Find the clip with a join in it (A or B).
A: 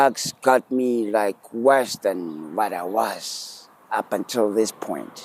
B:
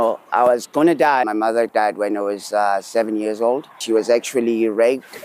B